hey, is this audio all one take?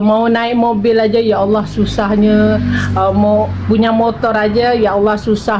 yes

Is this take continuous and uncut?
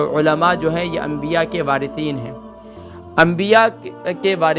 yes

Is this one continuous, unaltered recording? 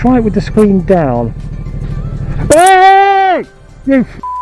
yes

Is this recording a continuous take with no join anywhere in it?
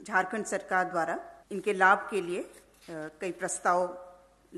no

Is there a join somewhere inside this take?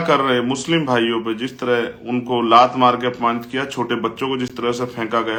no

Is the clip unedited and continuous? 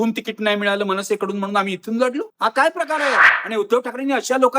no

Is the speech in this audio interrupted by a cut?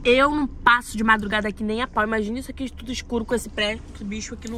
no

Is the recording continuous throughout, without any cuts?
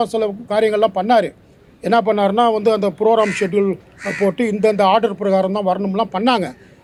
yes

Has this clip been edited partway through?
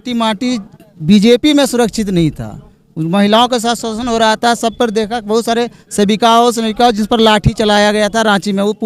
no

